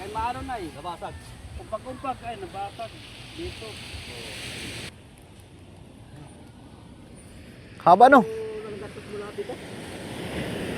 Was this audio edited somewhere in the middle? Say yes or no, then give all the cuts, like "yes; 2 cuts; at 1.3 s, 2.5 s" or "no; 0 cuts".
yes; 1 cut; at 4.9 s